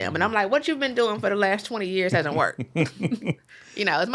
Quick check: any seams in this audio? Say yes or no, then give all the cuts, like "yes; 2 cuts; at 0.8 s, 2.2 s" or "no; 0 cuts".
no; 0 cuts